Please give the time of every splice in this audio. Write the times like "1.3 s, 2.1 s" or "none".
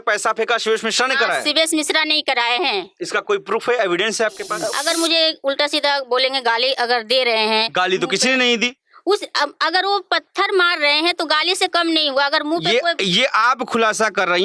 4.7 s